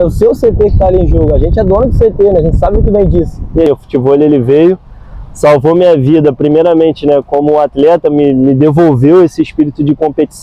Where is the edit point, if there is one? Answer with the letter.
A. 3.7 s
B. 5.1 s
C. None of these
A